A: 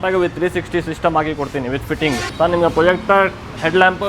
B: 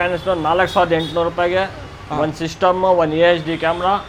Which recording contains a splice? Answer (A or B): A